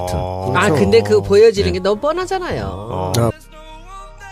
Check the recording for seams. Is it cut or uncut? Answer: cut